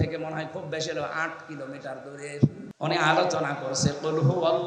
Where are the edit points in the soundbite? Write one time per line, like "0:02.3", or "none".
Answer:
0:02.7